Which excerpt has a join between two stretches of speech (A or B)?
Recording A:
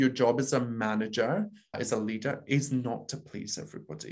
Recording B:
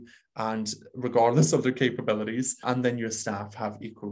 A